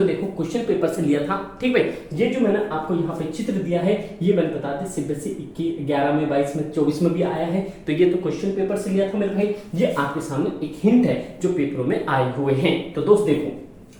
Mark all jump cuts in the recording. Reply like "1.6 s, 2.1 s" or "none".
none